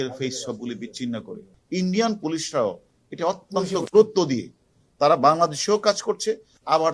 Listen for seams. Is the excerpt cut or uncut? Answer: cut